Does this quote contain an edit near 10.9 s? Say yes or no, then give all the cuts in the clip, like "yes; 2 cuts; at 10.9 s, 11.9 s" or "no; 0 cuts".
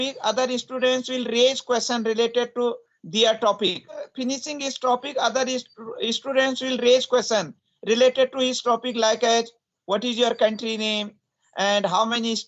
no; 1 cut; at 4.1 s